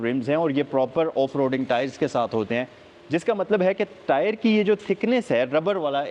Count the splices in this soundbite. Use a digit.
0